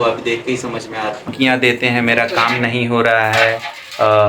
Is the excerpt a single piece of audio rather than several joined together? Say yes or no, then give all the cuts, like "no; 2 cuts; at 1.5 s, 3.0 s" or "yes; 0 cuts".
no; 1 cut; at 1.3 s